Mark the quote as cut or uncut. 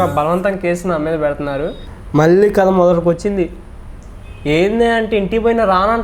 cut